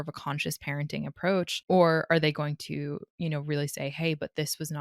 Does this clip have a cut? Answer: yes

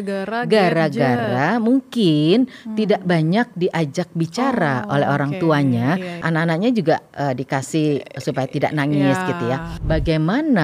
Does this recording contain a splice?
yes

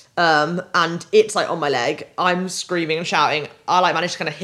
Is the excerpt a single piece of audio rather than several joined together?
yes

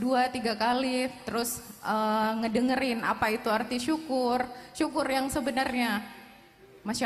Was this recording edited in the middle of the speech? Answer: no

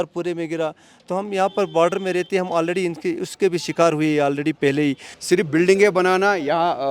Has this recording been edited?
yes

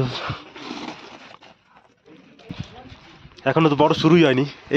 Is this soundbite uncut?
no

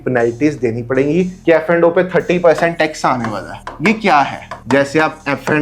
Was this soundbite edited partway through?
yes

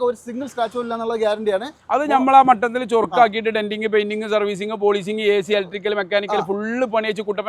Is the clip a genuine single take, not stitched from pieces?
yes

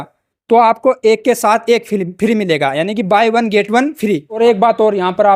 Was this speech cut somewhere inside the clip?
yes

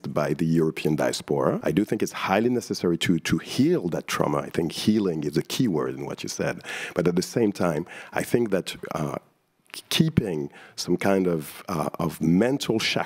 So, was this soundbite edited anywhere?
yes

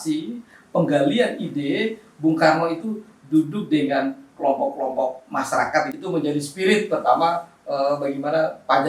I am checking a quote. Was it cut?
yes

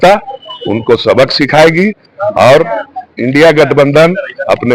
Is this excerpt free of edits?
yes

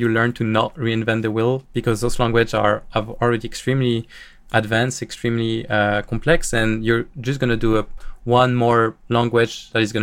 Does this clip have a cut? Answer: no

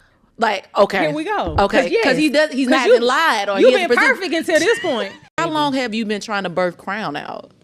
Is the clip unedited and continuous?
no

